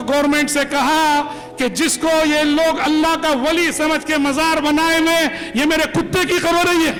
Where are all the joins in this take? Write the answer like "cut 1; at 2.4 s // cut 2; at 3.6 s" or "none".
none